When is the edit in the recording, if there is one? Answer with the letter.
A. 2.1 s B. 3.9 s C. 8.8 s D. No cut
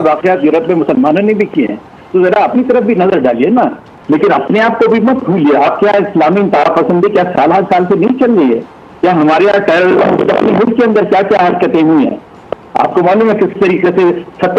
B